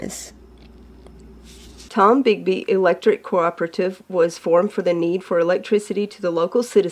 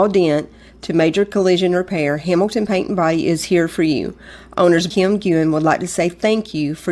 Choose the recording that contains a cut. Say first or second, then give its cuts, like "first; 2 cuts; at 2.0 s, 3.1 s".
first; 1 cut; at 1.7 s